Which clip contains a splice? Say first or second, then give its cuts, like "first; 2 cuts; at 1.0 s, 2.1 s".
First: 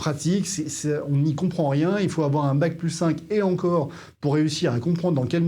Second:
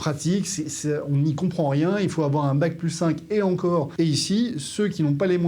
second; 1 cut; at 3.9 s